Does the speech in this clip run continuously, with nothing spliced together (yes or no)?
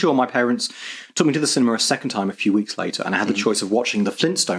yes